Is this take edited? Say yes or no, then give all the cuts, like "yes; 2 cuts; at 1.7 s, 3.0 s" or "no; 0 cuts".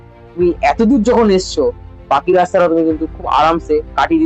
no; 0 cuts